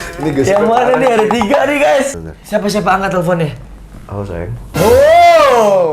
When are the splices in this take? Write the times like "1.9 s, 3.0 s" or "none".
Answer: 2.0 s

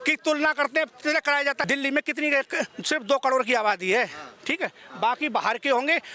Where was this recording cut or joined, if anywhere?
1.7 s

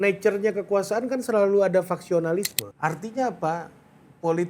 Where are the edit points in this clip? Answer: 2.6 s

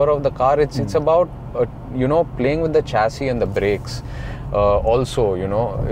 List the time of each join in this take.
none

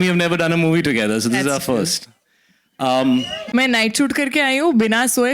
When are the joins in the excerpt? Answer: 3.4 s

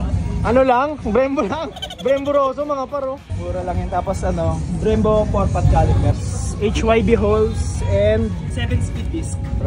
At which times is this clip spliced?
none

